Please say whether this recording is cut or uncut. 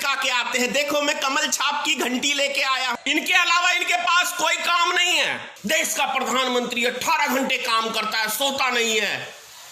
cut